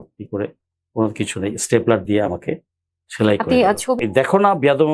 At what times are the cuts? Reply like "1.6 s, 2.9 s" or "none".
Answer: 4.0 s